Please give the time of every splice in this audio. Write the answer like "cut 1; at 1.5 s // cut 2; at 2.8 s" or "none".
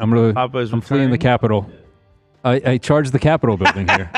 none